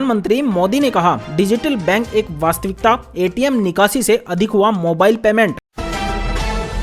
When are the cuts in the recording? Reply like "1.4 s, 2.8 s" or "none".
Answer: 5.6 s